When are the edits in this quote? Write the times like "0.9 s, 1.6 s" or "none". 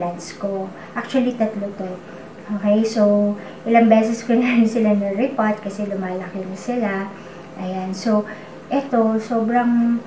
none